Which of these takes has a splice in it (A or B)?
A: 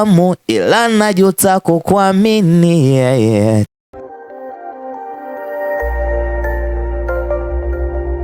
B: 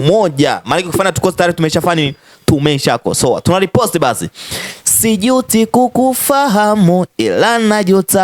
A